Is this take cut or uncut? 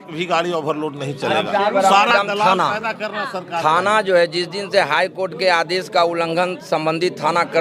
uncut